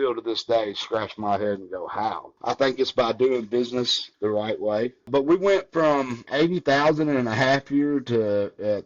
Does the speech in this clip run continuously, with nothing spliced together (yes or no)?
no